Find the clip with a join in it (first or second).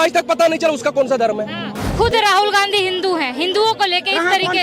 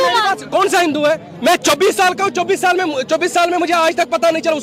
first